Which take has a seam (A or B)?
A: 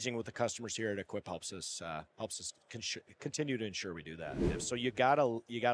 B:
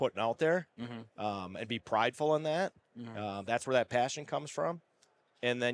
A